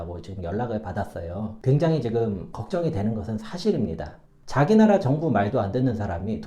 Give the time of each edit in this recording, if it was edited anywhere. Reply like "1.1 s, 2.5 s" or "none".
1.6 s, 4.4 s